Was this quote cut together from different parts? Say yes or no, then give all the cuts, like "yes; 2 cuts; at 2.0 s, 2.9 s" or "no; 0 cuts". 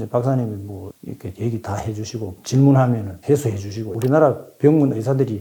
yes; 1 cut; at 3.9 s